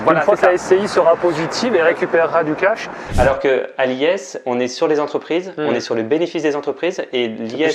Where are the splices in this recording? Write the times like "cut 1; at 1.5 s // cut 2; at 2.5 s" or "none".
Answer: cut 1; at 3.0 s